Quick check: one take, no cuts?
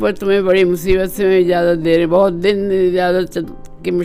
yes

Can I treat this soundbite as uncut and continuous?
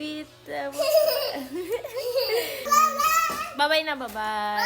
no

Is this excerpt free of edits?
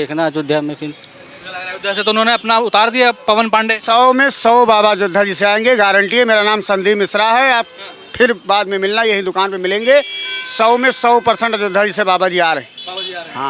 yes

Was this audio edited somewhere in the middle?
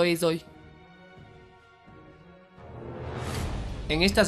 yes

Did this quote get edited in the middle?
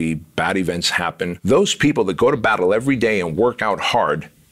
yes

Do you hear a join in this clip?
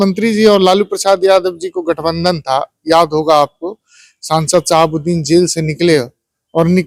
no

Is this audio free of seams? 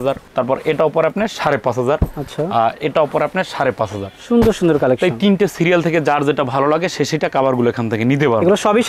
yes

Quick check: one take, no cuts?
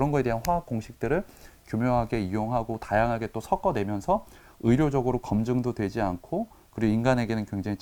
yes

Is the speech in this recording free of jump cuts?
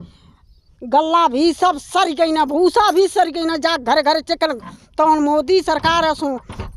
yes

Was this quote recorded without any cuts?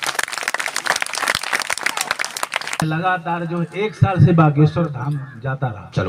no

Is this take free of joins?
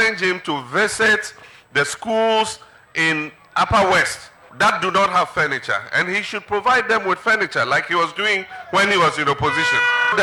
yes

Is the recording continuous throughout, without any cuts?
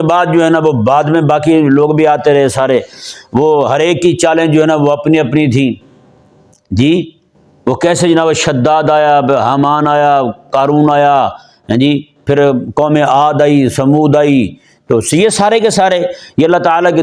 yes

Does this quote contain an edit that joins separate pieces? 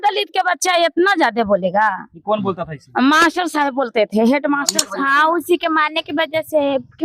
yes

